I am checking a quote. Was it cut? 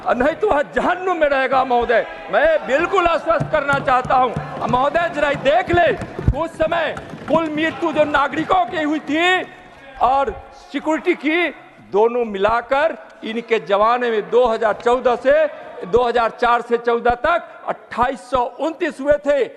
no; 0 cuts

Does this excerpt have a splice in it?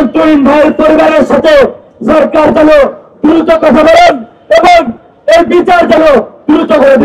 no; 0 cuts

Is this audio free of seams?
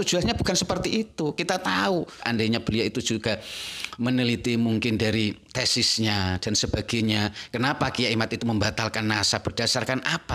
no; 1 cut; at 2.2 s

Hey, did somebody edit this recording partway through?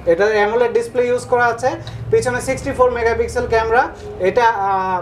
no; 0 cuts

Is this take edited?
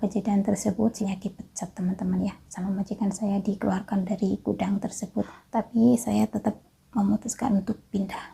yes; 2 cuts; at 1.0 s, 5.4 s

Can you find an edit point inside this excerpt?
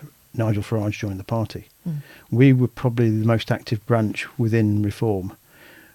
no; 0 cuts

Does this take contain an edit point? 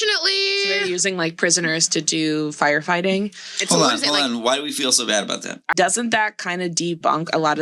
yes; 1 cut; at 5.6 s

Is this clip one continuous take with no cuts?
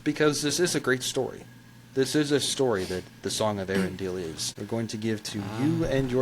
no; 1 cut; at 4.4 s

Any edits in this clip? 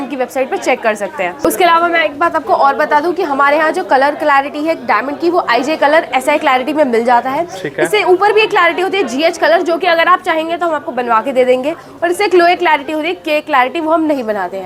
no; 0 cuts

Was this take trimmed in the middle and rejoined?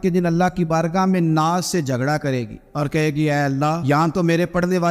yes; 1 cut; at 3.8 s

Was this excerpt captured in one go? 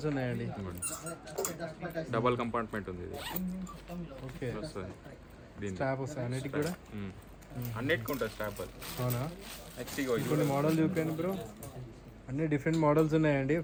yes; 0 cuts

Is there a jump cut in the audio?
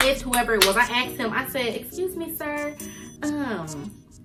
no; 0 cuts

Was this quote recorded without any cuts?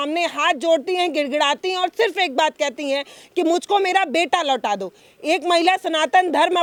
yes; 0 cuts

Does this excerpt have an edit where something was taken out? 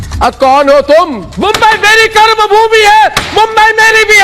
yes; 1 cut; at 1.3 s

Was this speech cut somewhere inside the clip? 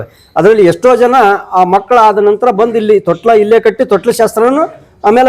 no; 0 cuts

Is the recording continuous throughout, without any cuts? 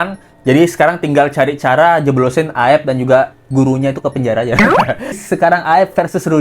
no; 1 cut; at 5.2 s

